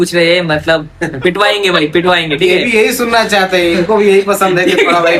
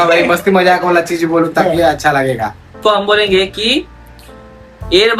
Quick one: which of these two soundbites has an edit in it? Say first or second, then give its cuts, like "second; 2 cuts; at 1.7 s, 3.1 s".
second; 1 cut; at 2.7 s